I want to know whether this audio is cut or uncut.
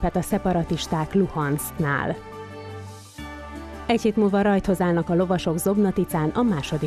uncut